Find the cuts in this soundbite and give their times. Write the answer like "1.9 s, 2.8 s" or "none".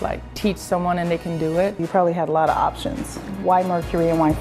1.8 s, 3.4 s

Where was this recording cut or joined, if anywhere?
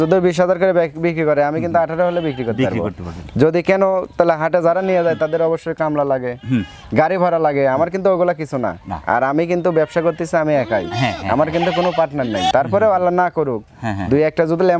12.5 s

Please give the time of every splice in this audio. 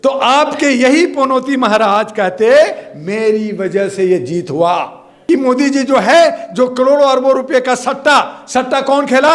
5.1 s

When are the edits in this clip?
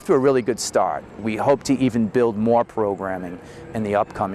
1.2 s

